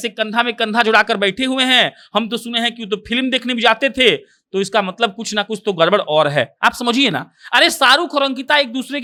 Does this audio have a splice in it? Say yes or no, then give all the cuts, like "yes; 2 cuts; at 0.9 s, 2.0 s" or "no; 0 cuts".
no; 0 cuts